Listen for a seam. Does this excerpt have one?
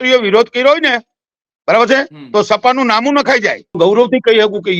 yes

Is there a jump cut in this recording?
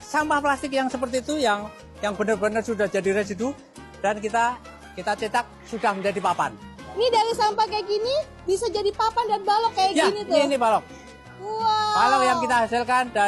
no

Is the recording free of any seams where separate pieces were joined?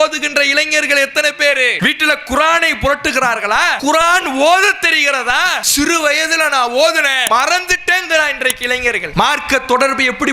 no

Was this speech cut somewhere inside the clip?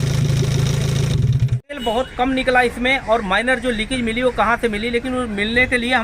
yes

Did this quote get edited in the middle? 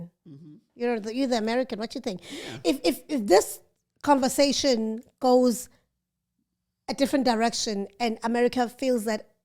no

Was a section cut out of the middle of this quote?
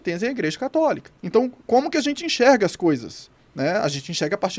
yes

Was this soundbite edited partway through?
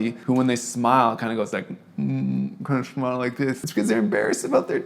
yes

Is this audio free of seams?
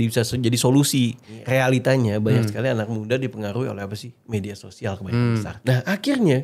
no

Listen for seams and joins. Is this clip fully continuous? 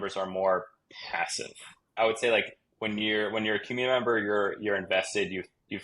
no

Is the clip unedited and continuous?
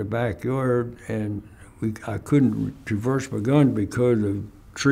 yes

